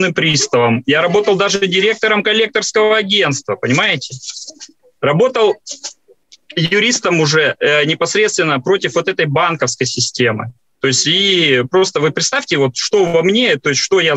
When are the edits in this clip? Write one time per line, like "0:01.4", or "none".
none